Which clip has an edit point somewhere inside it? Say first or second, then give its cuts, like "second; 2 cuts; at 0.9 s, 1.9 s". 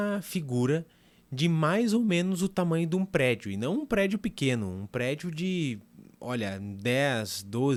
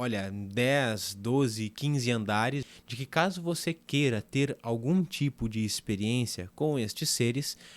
second; 1 cut; at 2.6 s